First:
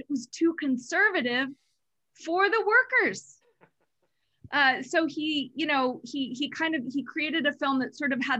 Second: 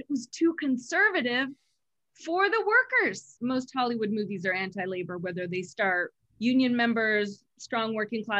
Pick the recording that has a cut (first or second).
second